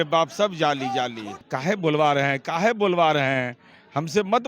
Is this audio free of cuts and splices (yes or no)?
no